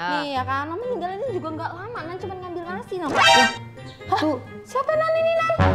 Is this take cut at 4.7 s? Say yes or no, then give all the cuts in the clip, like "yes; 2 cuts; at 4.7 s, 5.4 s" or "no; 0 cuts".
no; 1 cut; at 3.1 s